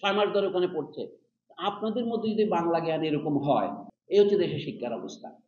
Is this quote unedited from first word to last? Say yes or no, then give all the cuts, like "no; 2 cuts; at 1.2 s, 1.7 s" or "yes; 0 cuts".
no; 1 cut; at 3.9 s